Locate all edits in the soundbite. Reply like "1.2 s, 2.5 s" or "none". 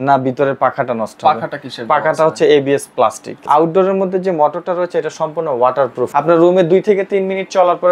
3.3 s, 6.1 s